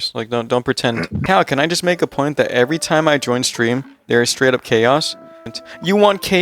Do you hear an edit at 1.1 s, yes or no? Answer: yes